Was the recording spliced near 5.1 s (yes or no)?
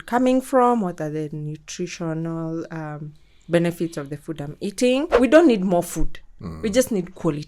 yes